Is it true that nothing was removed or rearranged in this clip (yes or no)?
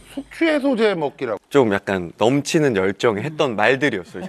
yes